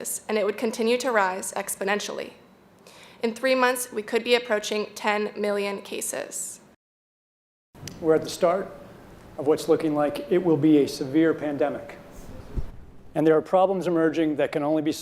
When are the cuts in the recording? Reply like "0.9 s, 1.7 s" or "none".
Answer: 7.1 s